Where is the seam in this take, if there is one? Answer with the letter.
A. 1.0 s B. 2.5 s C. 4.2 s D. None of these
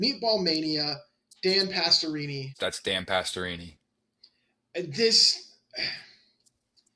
B